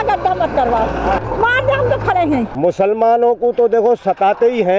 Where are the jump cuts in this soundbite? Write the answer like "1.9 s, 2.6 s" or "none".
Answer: 1.2 s, 2.5 s